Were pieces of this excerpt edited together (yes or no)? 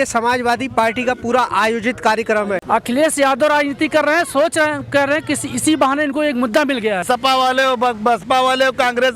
yes